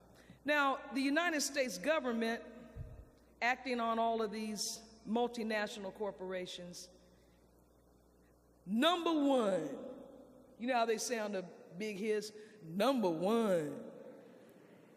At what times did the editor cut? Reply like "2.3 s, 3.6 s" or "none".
none